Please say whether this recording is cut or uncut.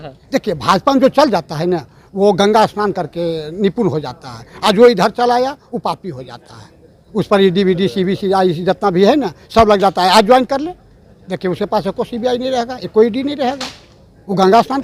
uncut